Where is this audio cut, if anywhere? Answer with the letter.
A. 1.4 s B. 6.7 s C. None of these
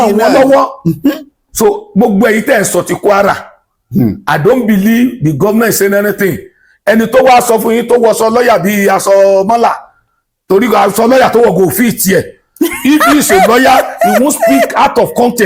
A